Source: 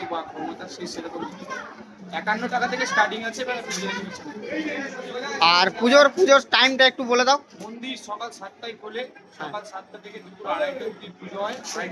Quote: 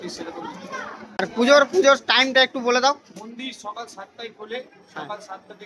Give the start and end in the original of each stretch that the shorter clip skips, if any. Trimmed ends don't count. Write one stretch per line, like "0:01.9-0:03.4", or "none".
0:02.0-0:05.6